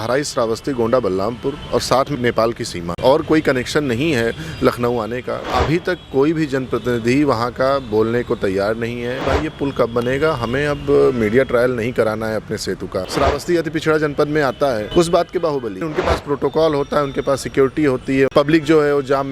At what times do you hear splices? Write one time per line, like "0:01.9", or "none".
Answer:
0:02.8
0:05.5
0:09.3
0:13.0
0:14.8
0:15.9
0:18.3